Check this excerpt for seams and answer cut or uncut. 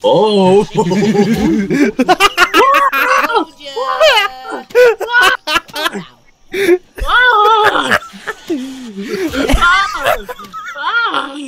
uncut